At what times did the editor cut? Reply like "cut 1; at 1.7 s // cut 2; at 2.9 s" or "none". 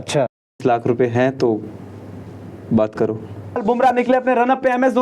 cut 1; at 3.6 s

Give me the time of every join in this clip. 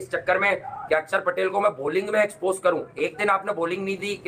none

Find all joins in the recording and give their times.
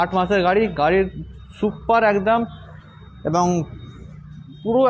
none

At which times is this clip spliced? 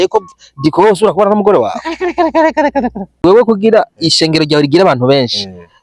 cut 1; at 3.2 s

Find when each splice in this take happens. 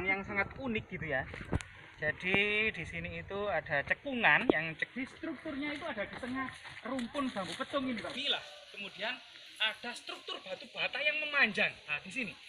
cut 1; at 4.8 s // cut 2; at 8.2 s

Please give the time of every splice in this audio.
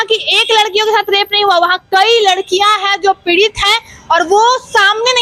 none

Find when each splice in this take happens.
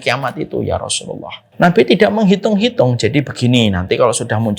cut 1; at 1.4 s

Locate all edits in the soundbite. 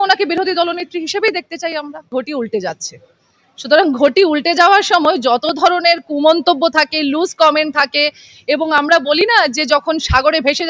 cut 1; at 2.1 s

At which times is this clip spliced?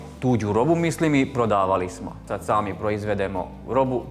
cut 1; at 2.3 s

